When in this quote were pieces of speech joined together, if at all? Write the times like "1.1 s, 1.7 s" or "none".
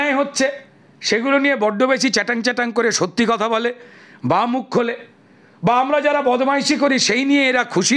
none